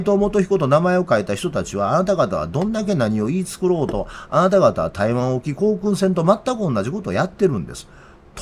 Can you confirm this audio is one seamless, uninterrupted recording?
yes; 0 cuts

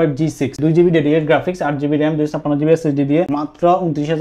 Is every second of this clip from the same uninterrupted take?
no; 1 cut; at 3.3 s

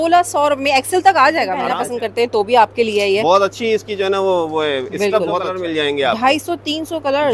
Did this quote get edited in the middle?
yes; 2 cuts; at 1.7 s, 5.4 s

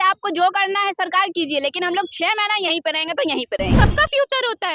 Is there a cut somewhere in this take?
yes; 1 cut; at 3.7 s

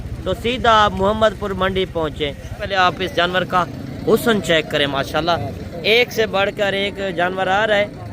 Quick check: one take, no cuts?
no; 1 cut; at 2.6 s

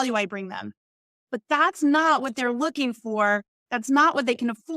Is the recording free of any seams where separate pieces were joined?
yes; 0 cuts

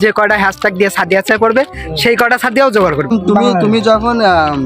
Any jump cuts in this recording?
yes; 1 cut; at 3.1 s

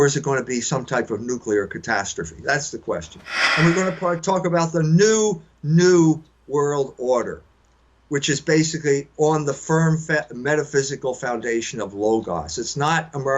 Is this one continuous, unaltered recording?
no; 1 cut; at 3.4 s

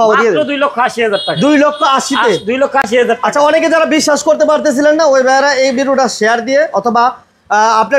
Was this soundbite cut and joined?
no; 0 cuts

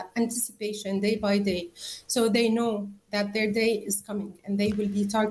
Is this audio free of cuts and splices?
yes; 0 cuts

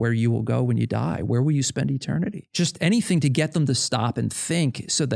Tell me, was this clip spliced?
yes; 1 cut; at 2.5 s

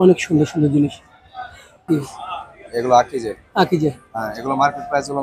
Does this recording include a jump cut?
yes; 1 cut; at 1.9 s

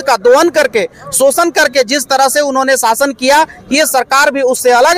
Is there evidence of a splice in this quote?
no; 0 cuts

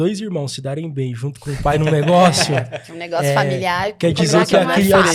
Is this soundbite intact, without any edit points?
yes; 0 cuts

